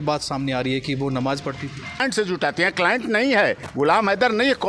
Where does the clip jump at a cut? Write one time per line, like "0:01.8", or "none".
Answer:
0:02.0

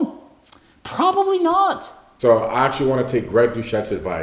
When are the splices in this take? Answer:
0:02.0

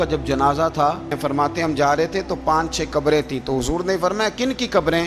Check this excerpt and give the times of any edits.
0:01.2

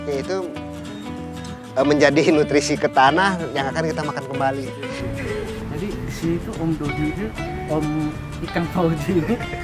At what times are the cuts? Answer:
0:05.0

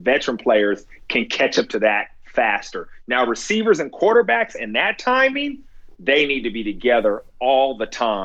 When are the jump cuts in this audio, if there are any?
none

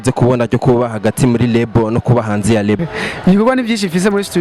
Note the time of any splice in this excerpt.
0:02.9

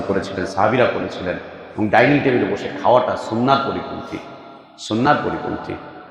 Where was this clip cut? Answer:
none

